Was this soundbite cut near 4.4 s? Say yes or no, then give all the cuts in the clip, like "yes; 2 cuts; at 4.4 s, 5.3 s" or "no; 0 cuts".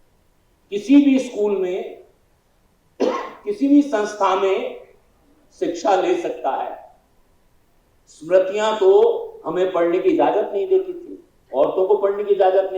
no; 0 cuts